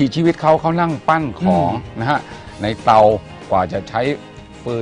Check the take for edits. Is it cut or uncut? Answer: uncut